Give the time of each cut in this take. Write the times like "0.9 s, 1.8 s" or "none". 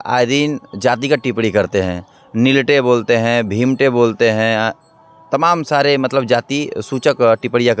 none